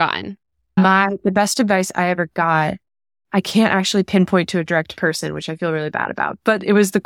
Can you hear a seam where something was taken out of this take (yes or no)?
no